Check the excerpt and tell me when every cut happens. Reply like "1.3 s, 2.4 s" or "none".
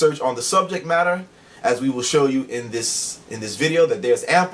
none